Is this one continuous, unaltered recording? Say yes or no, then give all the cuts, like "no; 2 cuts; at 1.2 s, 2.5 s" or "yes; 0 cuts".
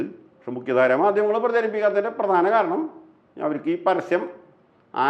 yes; 0 cuts